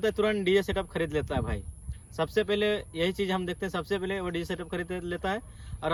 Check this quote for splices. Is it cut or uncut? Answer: uncut